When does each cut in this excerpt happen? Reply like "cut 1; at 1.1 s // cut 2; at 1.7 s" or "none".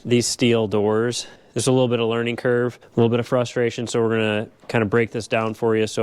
cut 1; at 1.3 s // cut 2; at 2.8 s